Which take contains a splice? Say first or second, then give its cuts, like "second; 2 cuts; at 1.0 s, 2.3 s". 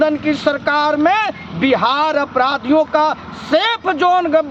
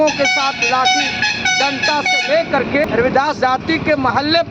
second; 1 cut; at 2.8 s